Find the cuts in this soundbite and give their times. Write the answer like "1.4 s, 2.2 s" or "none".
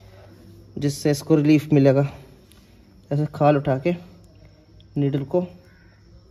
none